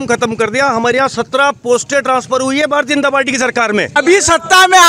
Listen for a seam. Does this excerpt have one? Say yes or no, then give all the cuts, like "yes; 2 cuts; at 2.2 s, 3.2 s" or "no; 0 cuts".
yes; 1 cut; at 4.0 s